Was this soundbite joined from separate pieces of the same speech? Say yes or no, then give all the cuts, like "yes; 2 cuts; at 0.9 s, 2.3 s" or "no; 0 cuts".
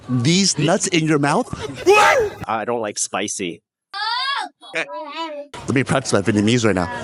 no; 0 cuts